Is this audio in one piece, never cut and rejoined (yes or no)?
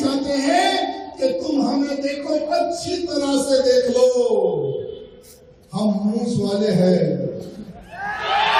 yes